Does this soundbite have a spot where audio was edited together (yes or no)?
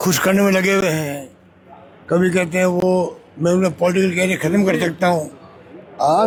no